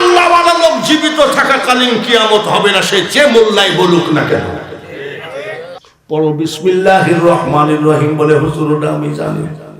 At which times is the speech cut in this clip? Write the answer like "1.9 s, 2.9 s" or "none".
5.9 s